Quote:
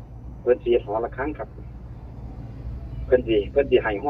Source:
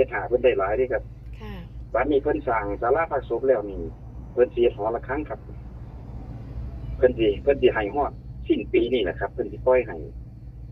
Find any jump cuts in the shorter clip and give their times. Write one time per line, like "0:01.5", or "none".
none